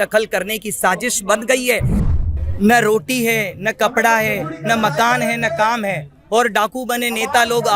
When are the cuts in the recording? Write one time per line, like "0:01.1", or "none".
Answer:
0:02.0